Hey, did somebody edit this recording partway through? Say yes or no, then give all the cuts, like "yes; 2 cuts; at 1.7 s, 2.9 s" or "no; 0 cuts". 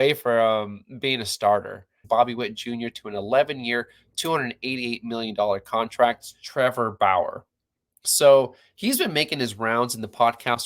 yes; 2 cuts; at 2.0 s, 6.4 s